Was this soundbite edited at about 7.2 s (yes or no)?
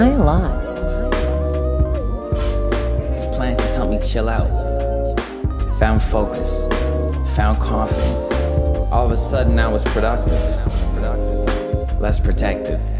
no